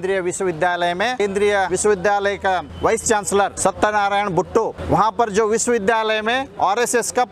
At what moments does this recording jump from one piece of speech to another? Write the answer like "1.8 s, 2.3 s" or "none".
1.5 s, 2.7 s, 3.5 s, 4.8 s, 6.5 s